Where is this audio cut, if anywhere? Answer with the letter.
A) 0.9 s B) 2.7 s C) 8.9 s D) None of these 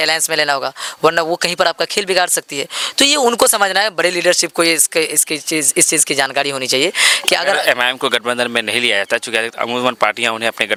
D